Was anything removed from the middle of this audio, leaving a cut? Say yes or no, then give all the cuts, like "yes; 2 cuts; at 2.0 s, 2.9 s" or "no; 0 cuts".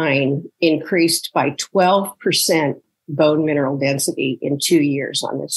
no; 0 cuts